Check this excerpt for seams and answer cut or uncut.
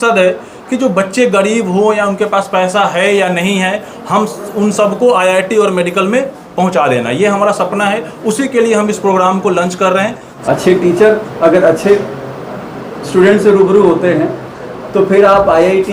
cut